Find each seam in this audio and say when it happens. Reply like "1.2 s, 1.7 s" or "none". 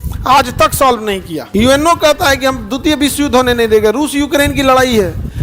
1.4 s

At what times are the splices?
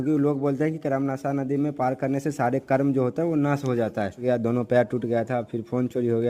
4.2 s

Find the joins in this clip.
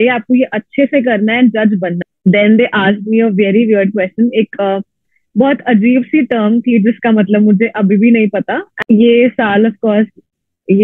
2.0 s, 8.6 s

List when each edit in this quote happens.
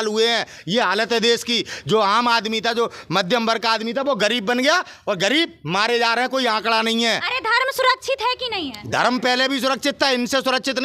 none

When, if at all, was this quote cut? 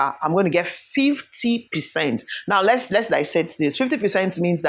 none

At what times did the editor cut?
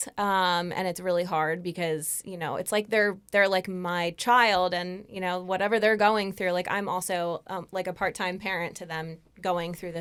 none

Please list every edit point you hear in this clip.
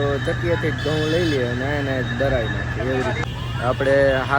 3.2 s

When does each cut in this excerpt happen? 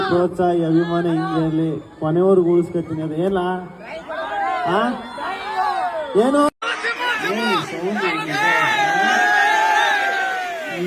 6.7 s

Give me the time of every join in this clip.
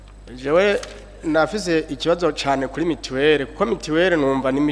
none

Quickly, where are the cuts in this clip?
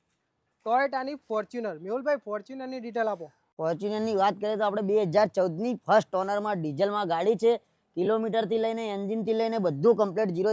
none

